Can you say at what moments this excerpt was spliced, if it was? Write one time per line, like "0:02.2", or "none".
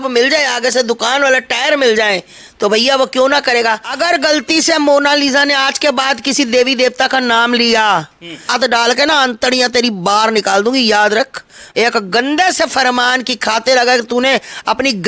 0:03.9
0:08.5
0:11.6

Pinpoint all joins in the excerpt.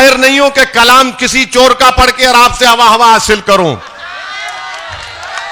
none

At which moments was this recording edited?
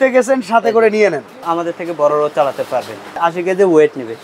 0:01.5
0:03.2

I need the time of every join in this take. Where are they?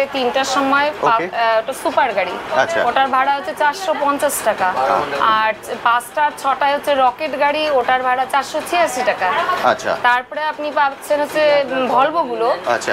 none

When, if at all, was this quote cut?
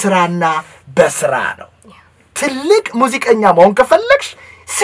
none

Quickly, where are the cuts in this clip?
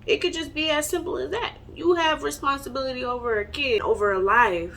0:03.8

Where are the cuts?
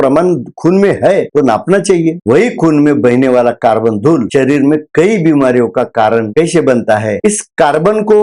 0:07.2

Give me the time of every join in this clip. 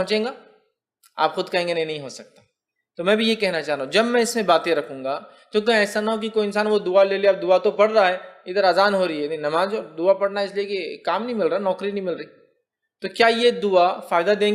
none

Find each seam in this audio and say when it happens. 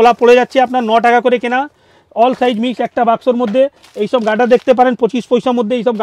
none

